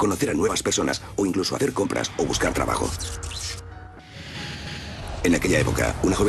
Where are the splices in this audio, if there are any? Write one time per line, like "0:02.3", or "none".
0:05.2